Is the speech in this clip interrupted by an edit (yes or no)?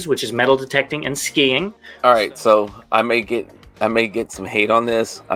yes